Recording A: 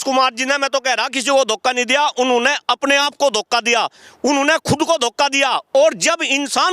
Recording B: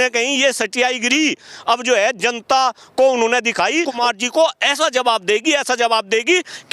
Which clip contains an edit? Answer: B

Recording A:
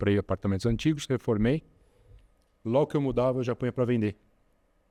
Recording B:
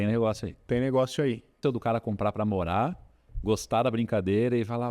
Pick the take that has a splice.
B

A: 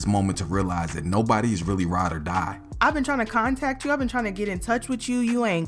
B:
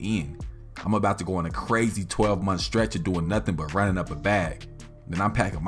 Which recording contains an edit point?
A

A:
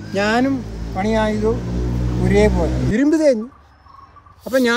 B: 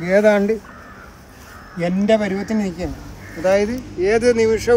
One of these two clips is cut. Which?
A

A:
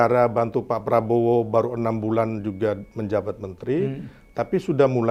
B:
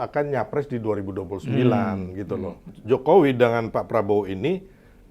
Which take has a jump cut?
B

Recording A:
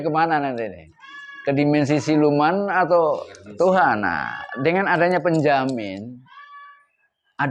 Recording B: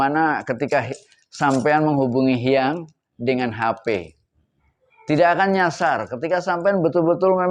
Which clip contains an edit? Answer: A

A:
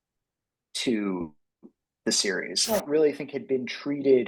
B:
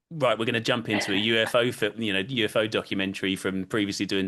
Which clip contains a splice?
A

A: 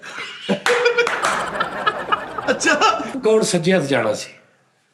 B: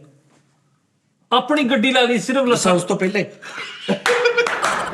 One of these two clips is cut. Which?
A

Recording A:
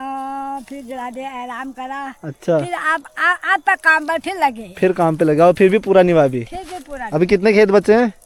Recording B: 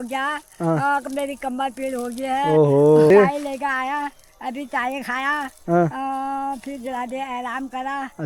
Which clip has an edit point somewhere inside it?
B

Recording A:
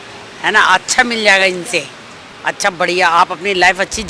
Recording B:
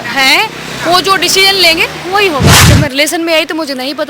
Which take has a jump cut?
B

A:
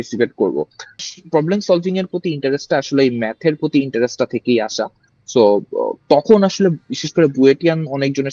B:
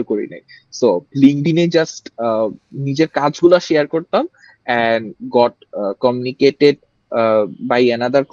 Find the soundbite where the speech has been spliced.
A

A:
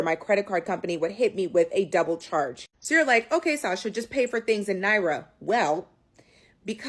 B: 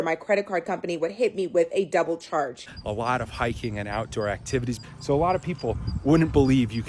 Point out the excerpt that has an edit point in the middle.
B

